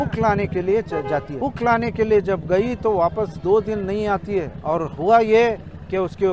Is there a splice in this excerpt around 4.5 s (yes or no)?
yes